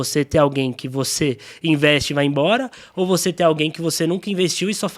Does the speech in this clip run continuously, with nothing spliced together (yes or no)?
yes